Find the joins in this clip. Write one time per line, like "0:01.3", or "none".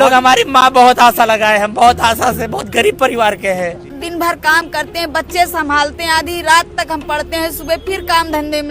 0:04.0